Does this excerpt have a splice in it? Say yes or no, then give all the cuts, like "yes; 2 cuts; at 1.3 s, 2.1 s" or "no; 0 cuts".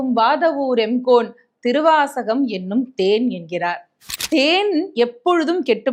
yes; 1 cut; at 4.1 s